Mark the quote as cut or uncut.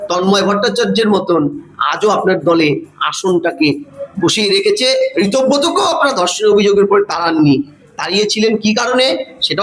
uncut